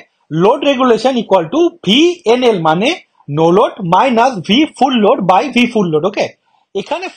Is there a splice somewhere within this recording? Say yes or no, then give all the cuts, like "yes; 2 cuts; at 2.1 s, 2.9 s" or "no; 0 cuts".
no; 0 cuts